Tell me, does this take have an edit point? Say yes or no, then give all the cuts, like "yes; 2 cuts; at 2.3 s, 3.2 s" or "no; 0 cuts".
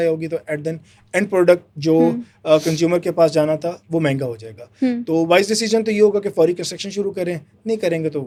no; 0 cuts